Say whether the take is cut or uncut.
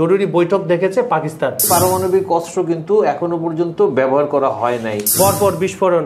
cut